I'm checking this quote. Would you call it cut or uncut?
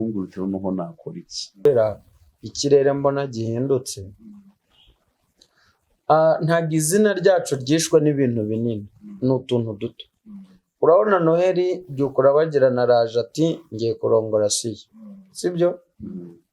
cut